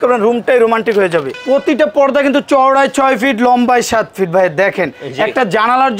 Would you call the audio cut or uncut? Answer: cut